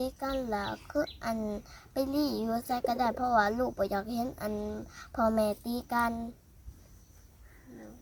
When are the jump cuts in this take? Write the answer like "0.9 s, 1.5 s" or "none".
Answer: none